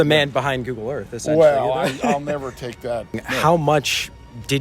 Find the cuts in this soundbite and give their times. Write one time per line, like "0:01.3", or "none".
0:03.2